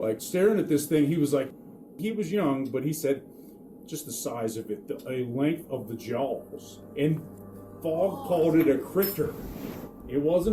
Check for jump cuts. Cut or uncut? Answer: cut